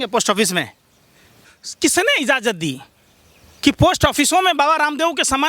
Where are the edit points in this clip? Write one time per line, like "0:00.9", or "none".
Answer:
0:01.4

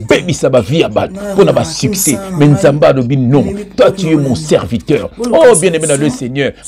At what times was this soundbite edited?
none

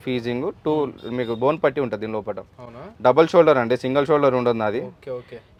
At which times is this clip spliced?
none

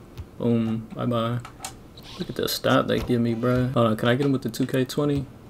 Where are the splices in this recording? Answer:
0:03.7

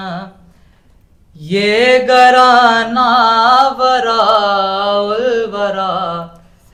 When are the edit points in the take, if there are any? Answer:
none

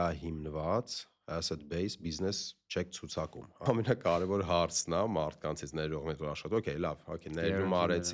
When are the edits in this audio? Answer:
0:03.5

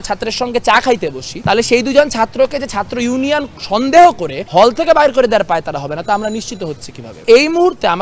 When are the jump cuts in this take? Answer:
0:01.3
0:04.3
0:07.1

